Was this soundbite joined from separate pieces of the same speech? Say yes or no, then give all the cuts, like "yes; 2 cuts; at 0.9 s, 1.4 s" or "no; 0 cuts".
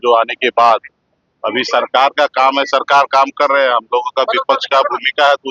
no; 0 cuts